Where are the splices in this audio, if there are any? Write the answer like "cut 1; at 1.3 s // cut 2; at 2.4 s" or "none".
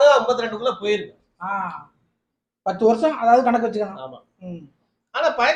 none